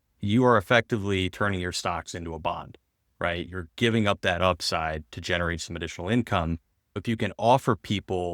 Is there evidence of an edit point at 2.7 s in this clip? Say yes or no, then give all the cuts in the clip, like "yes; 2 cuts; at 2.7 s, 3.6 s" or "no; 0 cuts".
no; 1 cut; at 7.0 s